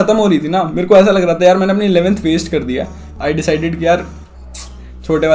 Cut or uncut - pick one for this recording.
cut